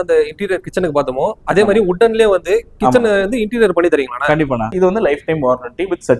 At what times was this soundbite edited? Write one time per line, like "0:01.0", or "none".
0:04.7